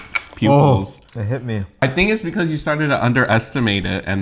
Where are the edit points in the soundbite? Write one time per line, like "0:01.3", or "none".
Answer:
0:01.8